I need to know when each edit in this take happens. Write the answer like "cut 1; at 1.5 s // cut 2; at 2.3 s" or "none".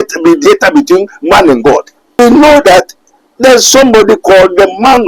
cut 1; at 2.2 s